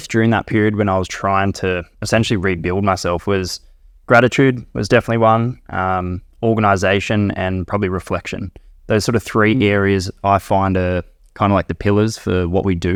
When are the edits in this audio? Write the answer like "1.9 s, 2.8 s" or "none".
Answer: none